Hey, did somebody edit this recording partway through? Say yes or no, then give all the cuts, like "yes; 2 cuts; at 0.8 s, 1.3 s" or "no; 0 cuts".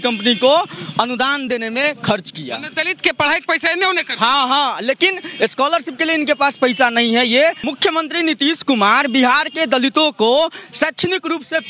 yes; 1 cut; at 7.7 s